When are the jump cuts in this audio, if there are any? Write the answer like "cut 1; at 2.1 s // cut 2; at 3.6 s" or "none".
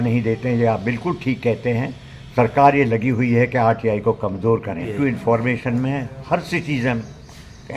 cut 1; at 4.9 s